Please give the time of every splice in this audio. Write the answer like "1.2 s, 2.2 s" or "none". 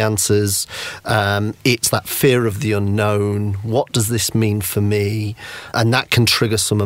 5.7 s